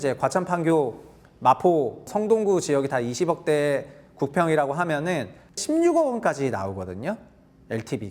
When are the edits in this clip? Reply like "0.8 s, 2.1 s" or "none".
2.1 s, 5.6 s